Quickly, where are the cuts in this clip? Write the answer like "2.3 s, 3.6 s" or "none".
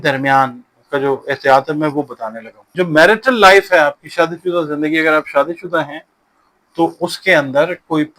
2.7 s